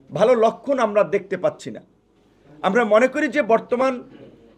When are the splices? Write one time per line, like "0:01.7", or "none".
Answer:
none